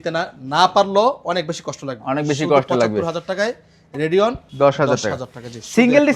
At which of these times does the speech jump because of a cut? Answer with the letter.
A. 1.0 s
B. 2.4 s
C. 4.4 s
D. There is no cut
C